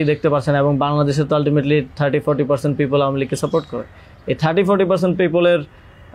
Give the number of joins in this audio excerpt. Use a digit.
0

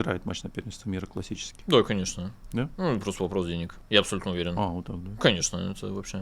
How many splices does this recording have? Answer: 1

